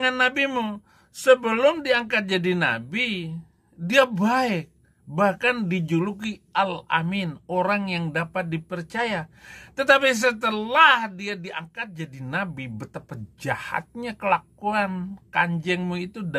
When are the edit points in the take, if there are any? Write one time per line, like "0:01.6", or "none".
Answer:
none